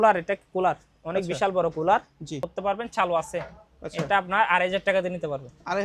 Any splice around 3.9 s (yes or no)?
no